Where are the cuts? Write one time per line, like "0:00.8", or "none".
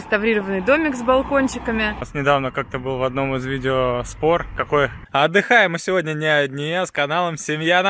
0:02.0
0:05.0